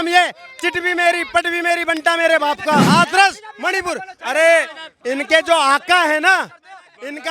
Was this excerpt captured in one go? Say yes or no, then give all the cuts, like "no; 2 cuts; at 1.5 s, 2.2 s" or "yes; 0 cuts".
no; 1 cut; at 2.9 s